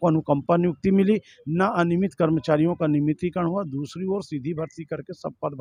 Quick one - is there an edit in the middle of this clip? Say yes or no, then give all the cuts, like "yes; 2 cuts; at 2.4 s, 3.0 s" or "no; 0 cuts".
no; 0 cuts